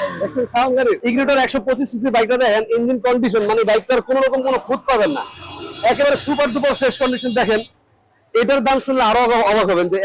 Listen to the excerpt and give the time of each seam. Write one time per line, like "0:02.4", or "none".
0:01.0